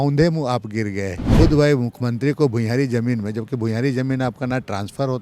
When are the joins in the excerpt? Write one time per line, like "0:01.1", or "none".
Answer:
0:01.3